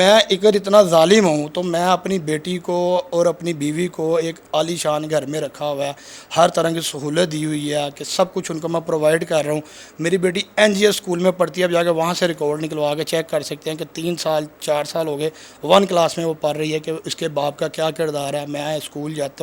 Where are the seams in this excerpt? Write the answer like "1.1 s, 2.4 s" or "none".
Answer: none